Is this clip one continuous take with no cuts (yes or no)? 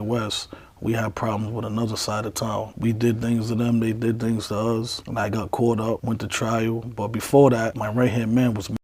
yes